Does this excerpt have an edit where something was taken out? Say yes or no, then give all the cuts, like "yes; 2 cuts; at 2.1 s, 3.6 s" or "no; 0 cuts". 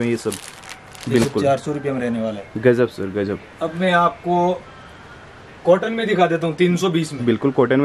no; 0 cuts